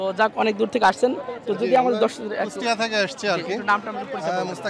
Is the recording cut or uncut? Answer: uncut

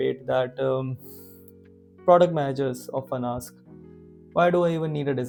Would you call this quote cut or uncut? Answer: uncut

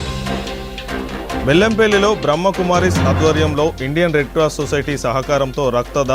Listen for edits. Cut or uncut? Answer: cut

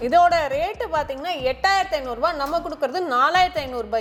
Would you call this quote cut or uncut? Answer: uncut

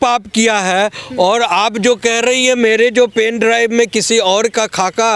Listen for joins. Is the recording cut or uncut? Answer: uncut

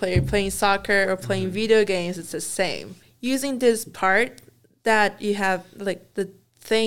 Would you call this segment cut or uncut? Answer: cut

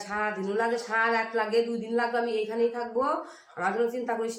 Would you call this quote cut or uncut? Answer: uncut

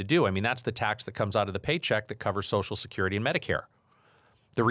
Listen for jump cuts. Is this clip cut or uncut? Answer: uncut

